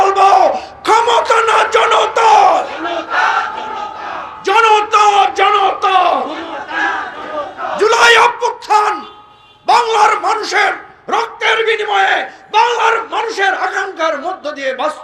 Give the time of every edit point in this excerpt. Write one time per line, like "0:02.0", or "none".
0:07.8